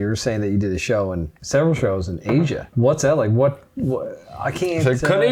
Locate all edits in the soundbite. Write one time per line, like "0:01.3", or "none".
0:01.3
0:02.7